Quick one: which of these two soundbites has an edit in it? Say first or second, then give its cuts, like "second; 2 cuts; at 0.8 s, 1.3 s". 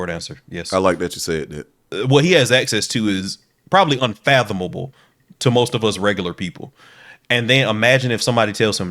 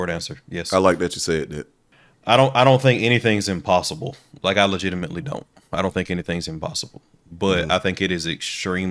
first; 1 cut; at 1.9 s